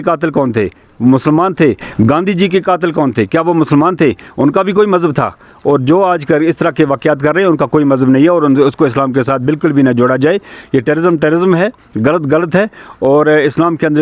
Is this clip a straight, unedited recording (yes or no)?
yes